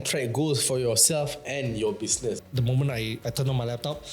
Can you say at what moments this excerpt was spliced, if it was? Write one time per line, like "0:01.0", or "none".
0:02.4